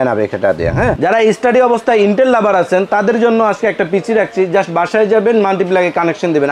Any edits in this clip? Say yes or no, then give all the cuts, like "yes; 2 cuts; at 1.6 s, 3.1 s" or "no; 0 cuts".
yes; 1 cut; at 1.0 s